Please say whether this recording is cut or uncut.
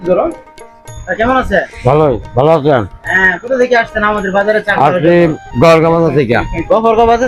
uncut